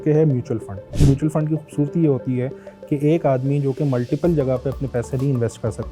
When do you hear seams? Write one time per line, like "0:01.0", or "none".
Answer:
0:00.9